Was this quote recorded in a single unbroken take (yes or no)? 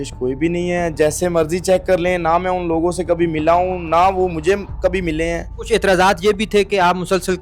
no